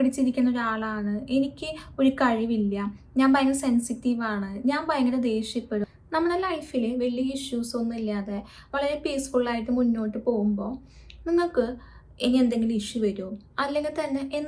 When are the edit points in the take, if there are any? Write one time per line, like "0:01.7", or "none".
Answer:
0:05.8